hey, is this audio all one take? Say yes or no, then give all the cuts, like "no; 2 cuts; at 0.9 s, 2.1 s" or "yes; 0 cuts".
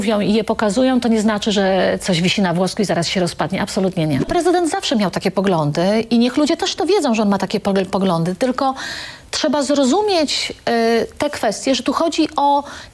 no; 1 cut; at 4.3 s